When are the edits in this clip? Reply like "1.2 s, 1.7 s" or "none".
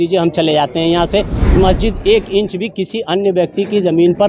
1.6 s